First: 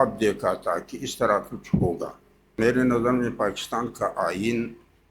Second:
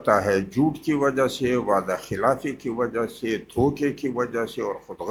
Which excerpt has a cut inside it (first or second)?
first